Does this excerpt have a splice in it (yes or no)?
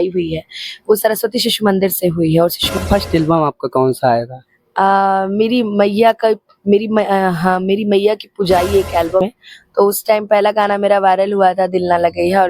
yes